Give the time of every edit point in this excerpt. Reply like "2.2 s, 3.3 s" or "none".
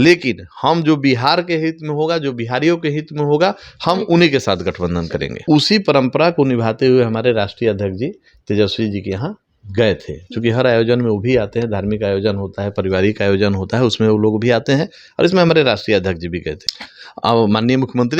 5.4 s, 16.6 s